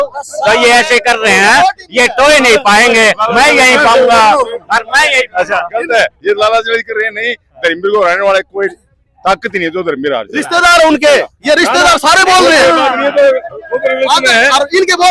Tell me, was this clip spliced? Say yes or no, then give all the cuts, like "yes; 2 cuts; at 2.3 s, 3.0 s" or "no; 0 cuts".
no; 0 cuts